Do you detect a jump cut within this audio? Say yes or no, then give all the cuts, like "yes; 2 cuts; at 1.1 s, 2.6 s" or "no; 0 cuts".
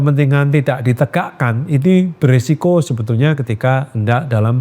no; 0 cuts